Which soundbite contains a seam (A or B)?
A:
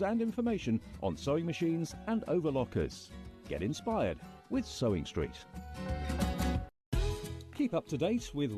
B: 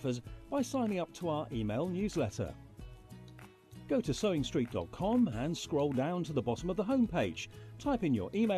A